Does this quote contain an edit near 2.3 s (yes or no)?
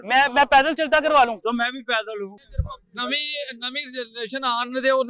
yes